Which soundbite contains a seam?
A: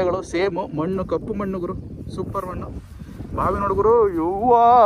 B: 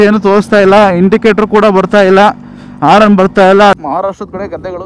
B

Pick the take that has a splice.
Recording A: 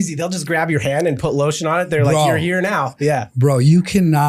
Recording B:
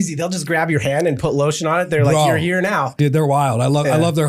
B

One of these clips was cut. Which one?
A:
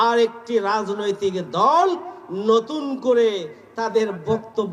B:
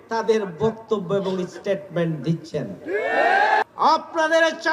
B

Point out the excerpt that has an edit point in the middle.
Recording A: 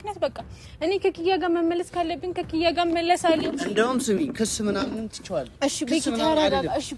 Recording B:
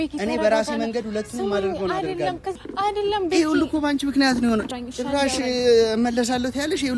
B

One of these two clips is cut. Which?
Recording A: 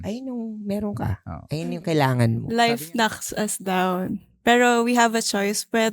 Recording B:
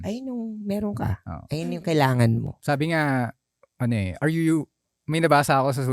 A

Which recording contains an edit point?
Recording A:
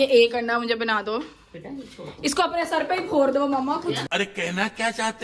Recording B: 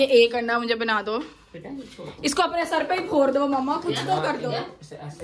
B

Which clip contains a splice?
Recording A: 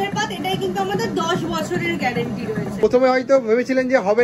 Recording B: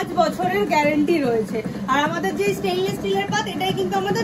A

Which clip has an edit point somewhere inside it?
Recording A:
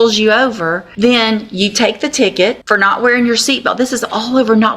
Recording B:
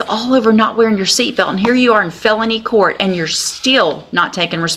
A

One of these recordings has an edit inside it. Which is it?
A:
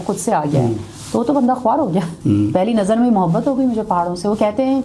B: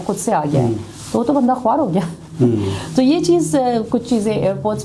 A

